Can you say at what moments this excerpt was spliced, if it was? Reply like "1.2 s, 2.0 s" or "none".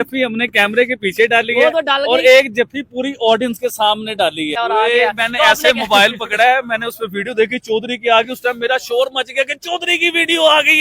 4.5 s